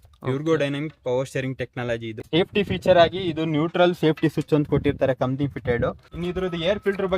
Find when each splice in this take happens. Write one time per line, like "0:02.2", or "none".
0:02.1
0:06.1